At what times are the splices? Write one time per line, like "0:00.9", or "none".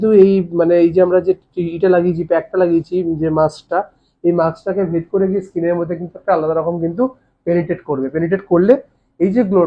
none